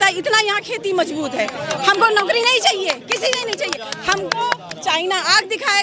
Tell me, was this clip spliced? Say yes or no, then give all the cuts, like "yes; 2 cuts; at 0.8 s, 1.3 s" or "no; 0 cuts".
no; 0 cuts